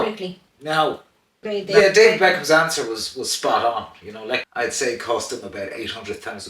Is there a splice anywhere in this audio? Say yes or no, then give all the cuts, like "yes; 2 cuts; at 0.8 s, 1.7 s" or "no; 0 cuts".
yes; 2 cuts; at 1.5 s, 4.5 s